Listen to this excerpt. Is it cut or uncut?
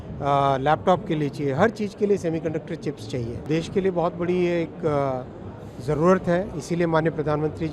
cut